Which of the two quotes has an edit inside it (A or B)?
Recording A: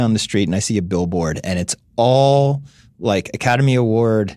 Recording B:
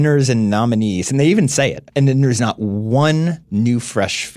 B